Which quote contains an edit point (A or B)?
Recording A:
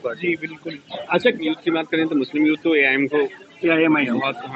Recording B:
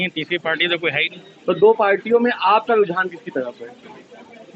A